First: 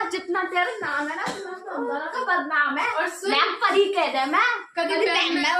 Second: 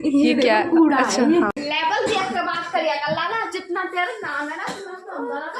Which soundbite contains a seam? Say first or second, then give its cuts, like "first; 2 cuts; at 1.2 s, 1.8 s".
second; 1 cut; at 1.5 s